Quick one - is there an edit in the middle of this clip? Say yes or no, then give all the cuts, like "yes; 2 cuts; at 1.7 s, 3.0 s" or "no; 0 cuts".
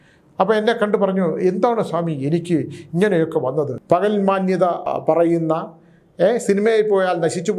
yes; 2 cuts; at 3.8 s, 4.9 s